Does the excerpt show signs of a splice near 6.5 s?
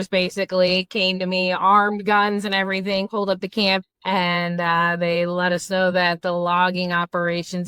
no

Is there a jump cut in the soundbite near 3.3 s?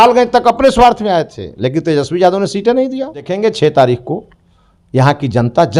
yes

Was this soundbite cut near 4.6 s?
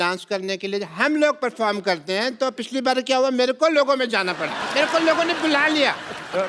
yes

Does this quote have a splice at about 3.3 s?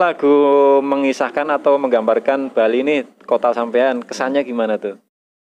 no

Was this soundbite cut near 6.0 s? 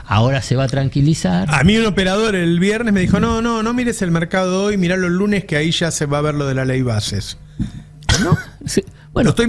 no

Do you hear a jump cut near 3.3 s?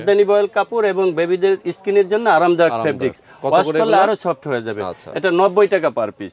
no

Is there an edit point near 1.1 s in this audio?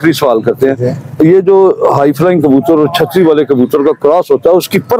no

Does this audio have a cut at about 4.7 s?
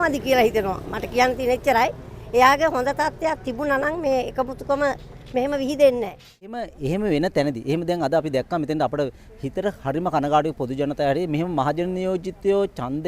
no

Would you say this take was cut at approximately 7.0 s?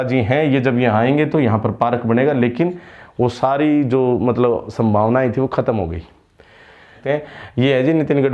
yes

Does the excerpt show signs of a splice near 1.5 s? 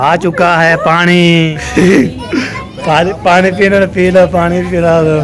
yes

